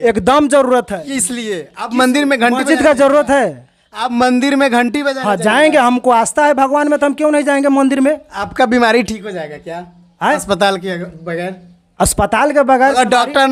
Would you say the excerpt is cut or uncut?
uncut